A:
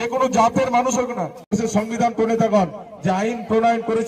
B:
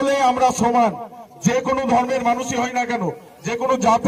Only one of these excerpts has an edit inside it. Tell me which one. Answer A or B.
A